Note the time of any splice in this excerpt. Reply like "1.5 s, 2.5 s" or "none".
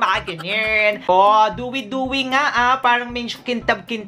1.0 s